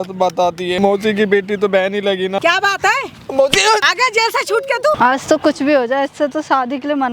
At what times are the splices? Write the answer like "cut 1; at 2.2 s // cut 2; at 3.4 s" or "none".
cut 1; at 0.8 s // cut 2; at 2.4 s // cut 3; at 3.9 s // cut 4; at 5.0 s